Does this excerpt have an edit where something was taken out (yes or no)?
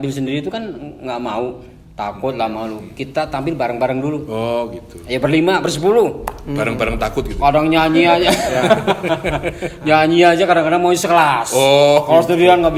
no